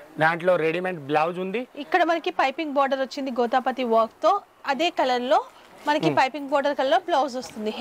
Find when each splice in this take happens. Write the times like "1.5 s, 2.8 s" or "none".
none